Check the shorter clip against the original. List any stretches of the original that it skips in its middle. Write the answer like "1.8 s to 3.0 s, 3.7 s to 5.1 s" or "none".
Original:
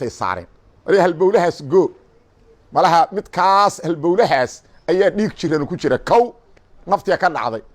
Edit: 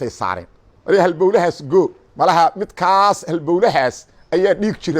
2.0 s to 2.6 s